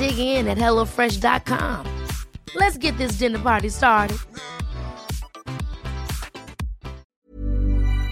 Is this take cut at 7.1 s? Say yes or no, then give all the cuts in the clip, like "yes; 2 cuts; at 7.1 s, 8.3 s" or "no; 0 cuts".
yes; 1 cut; at 7.1 s